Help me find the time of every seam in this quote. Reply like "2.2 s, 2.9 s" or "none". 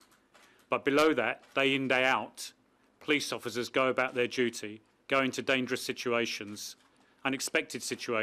none